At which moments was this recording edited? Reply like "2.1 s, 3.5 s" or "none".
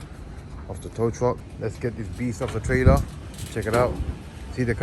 1.5 s

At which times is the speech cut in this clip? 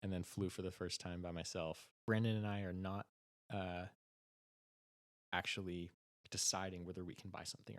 2.0 s

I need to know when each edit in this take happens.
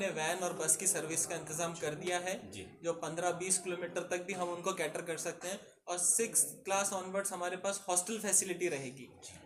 none

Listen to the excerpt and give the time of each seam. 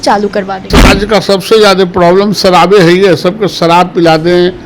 0.9 s

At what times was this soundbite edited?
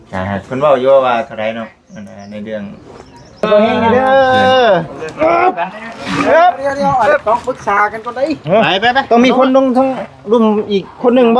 3.5 s

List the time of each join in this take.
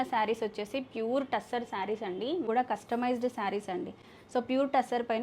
2.5 s

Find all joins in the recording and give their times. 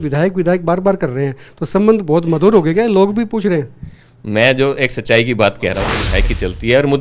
6.0 s

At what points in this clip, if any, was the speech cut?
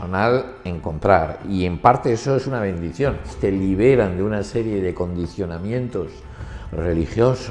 3.3 s

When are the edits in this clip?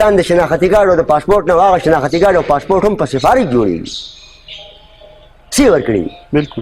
none

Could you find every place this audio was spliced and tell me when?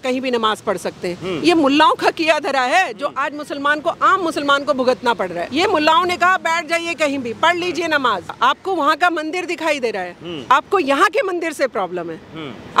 5.4 s, 8.3 s

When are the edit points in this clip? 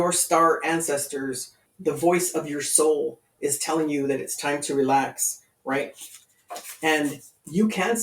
1.7 s

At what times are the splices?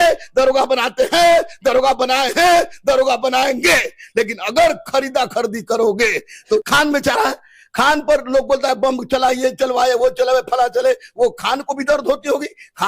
6.4 s

